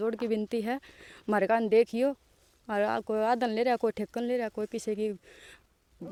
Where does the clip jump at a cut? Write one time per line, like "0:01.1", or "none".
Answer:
none